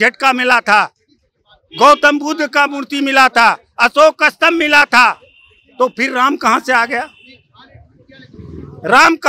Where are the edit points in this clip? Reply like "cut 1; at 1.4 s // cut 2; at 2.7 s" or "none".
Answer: none